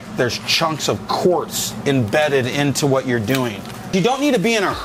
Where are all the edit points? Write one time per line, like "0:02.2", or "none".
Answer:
0:03.9